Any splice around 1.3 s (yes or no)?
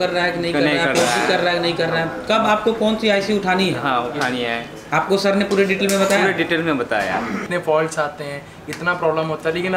no